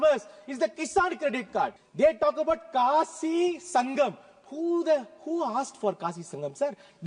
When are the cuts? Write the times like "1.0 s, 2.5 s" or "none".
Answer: 1.8 s